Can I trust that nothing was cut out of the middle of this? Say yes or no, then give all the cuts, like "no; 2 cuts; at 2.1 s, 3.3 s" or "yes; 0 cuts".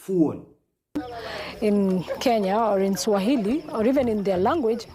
no; 1 cut; at 1.0 s